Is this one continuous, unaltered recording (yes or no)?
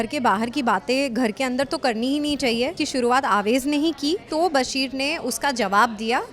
no